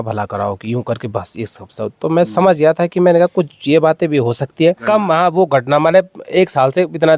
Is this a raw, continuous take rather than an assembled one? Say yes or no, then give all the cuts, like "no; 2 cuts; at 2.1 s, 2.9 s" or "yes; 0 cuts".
no; 1 cut; at 4.8 s